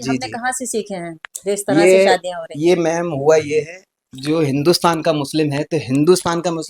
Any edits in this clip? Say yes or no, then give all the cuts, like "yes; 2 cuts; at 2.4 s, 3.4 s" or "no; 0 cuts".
no; 0 cuts